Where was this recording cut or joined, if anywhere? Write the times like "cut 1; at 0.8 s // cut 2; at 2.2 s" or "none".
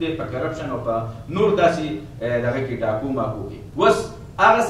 cut 1; at 3.6 s